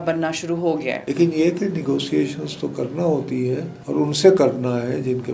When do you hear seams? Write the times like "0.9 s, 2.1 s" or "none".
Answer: 1.0 s, 3.7 s